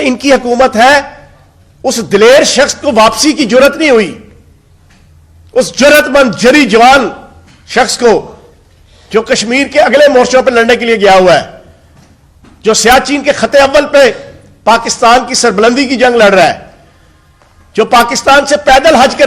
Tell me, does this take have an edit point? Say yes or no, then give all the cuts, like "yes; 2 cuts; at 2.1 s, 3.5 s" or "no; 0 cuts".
no; 0 cuts